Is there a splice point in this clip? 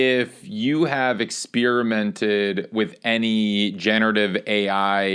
no; 0 cuts

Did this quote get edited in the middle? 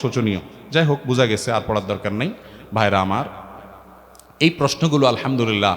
no; 0 cuts

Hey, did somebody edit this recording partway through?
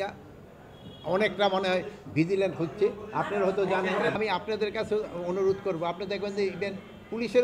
yes; 1 cut; at 4.2 s

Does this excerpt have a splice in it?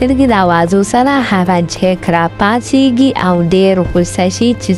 yes; 1 cut; at 2.5 s

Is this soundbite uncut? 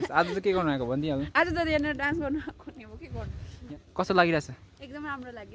no; 1 cut; at 3.7 s

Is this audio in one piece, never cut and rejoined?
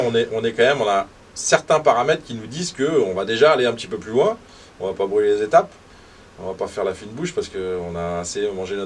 yes; 0 cuts

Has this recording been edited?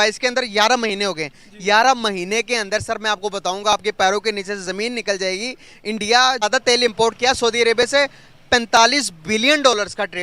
yes; 1 cut; at 6.4 s

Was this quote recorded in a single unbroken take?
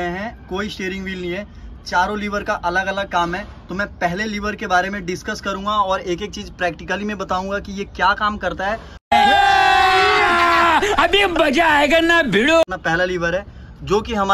yes; 0 cuts

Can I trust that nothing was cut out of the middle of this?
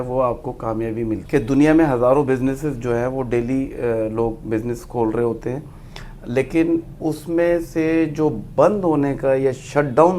no; 1 cut; at 1.2 s

